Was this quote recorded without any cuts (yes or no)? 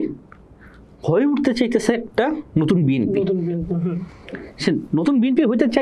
yes